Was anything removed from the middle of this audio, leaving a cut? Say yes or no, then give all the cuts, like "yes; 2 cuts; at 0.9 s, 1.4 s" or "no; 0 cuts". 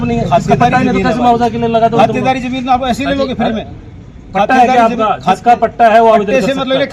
no; 0 cuts